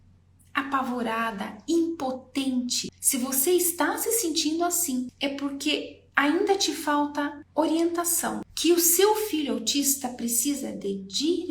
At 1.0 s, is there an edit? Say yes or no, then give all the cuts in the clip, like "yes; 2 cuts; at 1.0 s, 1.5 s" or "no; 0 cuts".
no; 4 cuts; at 2.9 s, 5.1 s, 7.4 s, 8.5 s